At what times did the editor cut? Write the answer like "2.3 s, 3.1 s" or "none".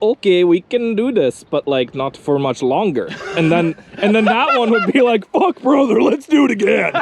none